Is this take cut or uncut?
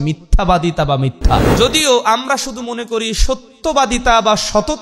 cut